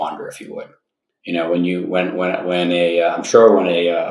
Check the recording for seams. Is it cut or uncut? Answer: uncut